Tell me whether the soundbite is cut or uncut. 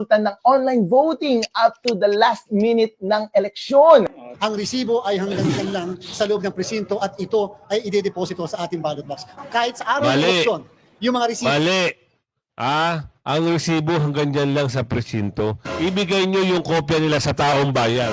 cut